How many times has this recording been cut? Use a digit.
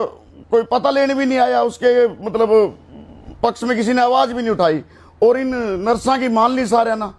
0